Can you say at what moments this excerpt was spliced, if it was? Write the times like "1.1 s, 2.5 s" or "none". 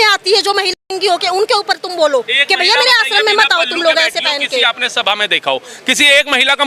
none